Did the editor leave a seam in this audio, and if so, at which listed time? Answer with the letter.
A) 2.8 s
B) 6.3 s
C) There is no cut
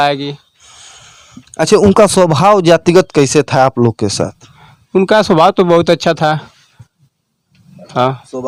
C